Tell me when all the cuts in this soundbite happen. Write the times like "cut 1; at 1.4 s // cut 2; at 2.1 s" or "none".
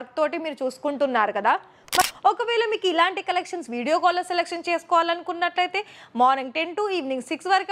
cut 1; at 2.0 s